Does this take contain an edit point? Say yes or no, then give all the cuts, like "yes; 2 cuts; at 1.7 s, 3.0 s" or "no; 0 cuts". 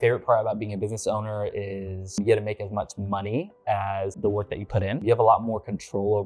yes; 1 cut; at 5.0 s